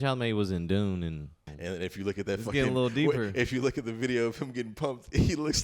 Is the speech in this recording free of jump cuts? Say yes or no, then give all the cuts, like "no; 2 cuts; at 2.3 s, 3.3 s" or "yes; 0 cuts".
no; 1 cut; at 1.5 s